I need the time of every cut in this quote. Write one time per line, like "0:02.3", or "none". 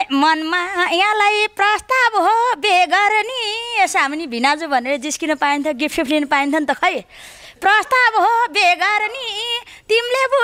none